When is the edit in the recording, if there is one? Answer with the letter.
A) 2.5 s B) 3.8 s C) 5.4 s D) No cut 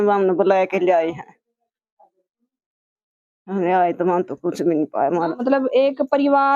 C